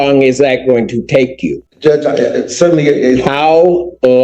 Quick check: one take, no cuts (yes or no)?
no